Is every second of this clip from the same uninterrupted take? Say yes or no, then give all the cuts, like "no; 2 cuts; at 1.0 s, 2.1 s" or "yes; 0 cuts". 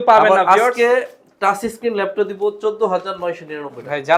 yes; 0 cuts